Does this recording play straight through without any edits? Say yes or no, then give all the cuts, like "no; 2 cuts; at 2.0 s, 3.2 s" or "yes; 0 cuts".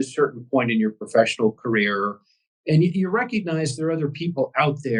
yes; 0 cuts